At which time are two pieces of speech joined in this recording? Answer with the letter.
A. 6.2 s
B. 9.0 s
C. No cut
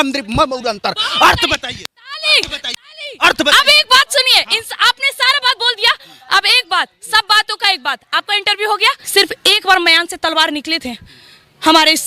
B